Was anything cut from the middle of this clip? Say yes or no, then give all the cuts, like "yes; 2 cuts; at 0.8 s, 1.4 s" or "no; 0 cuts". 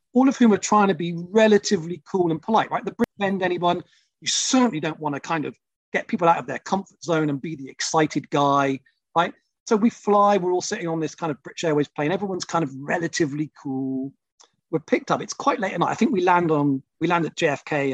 yes; 2 cuts; at 3.1 s, 14.2 s